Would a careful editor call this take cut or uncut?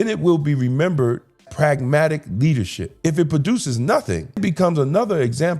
cut